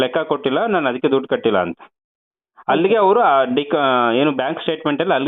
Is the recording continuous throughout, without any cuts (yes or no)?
yes